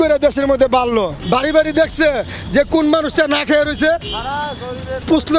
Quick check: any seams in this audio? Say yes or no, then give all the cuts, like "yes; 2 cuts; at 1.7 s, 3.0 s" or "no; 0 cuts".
yes; 1 cut; at 1.2 s